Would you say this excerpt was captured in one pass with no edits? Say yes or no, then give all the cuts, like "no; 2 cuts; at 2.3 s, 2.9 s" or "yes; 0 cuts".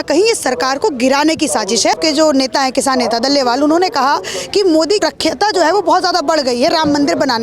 no; 2 cuts; at 2.0 s, 5.0 s